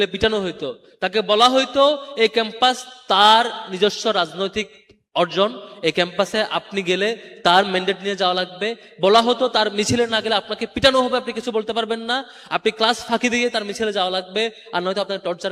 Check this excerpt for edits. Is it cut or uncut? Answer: uncut